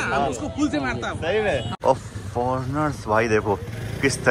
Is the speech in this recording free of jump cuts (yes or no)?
no